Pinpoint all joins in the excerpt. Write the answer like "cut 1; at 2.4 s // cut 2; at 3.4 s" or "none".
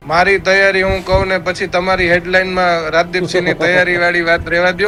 none